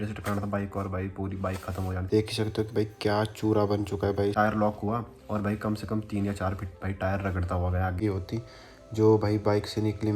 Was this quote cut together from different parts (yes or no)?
yes